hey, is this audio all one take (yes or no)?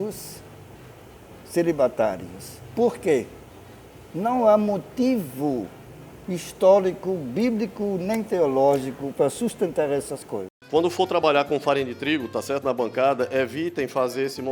no